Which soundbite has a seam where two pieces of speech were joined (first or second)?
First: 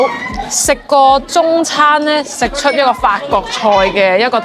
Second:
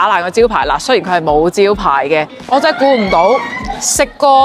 second